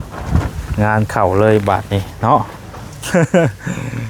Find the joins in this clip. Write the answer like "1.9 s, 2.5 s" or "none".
none